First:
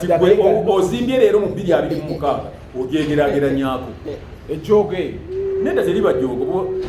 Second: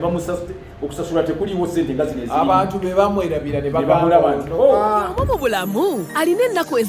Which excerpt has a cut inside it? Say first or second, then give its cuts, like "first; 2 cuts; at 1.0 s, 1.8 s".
second; 1 cut; at 5.1 s